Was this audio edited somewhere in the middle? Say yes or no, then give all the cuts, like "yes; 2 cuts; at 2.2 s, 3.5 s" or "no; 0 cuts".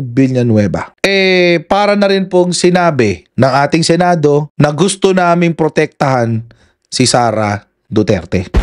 no; 0 cuts